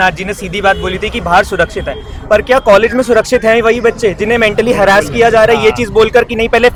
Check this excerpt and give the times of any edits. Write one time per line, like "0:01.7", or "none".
none